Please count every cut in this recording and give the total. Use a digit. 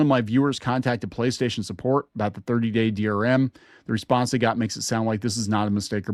0